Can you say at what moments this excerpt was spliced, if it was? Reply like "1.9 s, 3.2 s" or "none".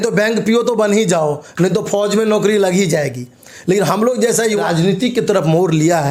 4.6 s

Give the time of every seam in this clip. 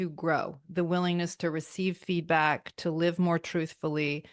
none

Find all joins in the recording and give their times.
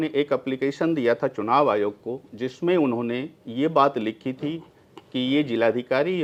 none

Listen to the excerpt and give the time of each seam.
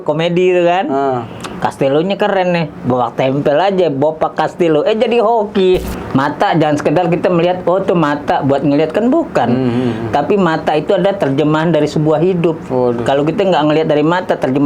5.9 s

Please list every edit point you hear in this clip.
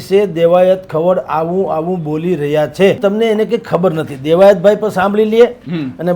3.0 s

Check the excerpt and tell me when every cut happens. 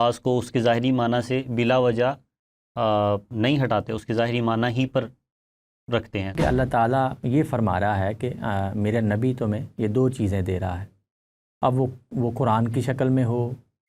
6.3 s

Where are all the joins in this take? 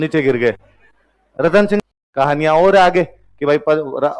1.8 s

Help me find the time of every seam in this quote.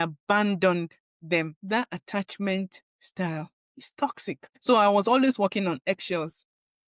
1.6 s, 4.5 s

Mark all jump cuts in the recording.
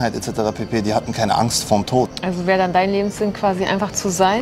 2.2 s

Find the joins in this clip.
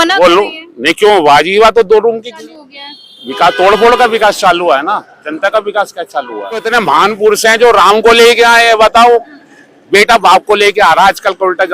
2.3 s, 6.7 s

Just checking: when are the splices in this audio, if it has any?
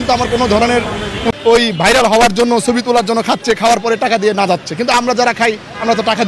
1.3 s

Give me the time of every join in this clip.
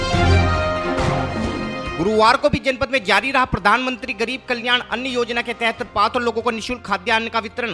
1.5 s

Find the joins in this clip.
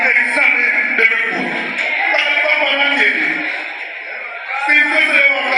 none

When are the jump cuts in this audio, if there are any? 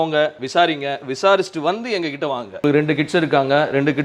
2.6 s

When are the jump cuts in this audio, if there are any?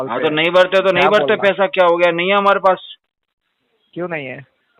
none

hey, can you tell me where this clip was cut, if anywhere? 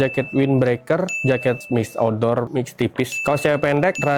none

